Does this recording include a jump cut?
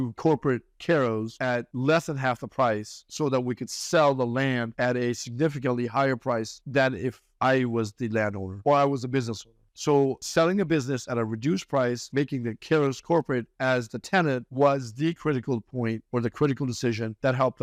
no; 0 cuts

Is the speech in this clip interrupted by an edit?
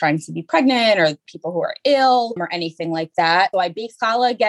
no; 0 cuts

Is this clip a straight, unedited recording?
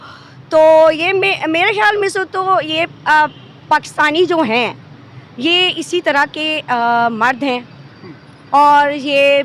yes; 0 cuts

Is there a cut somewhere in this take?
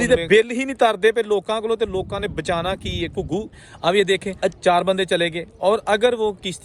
yes; 1 cut; at 3.6 s

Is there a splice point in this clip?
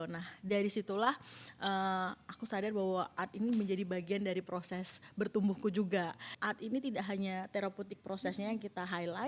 yes; 1 cut; at 6.3 s

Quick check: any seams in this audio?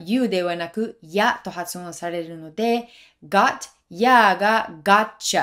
no; 0 cuts

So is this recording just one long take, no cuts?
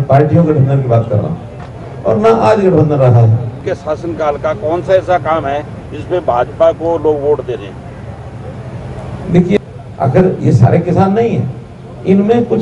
no; 2 cuts; at 3.7 s, 9.6 s

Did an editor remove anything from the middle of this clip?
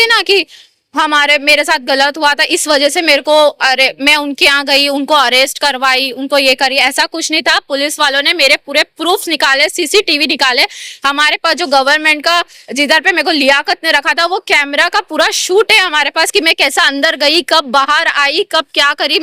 no; 0 cuts

